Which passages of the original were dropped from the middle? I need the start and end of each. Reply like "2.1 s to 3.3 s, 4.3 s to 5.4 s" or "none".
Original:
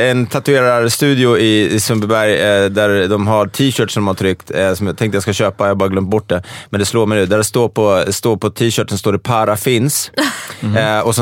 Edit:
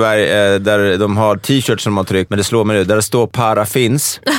4.4 s to 6.7 s, 7.7 s to 9.2 s